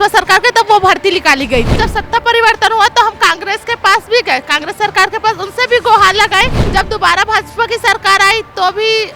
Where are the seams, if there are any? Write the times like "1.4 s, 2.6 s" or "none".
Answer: 1.8 s, 6.6 s